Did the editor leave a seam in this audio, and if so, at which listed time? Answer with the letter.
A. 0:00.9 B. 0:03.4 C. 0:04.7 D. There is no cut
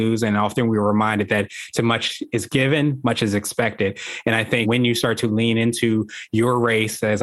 C